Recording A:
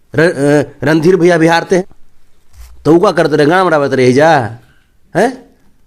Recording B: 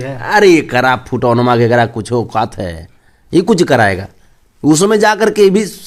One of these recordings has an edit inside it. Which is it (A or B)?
A